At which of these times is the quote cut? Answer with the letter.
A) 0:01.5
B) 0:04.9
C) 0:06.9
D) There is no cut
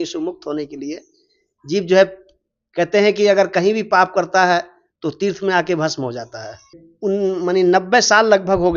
C